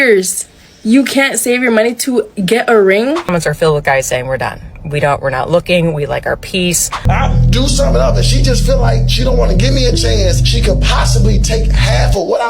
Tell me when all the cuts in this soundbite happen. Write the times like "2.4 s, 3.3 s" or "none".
3.3 s, 7.0 s

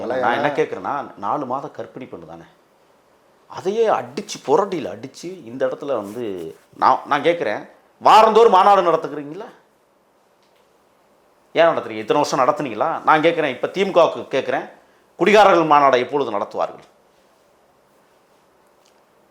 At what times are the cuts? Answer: 6.6 s

